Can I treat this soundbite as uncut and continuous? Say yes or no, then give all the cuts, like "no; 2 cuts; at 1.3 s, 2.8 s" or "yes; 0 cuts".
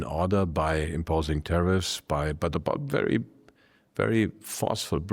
yes; 0 cuts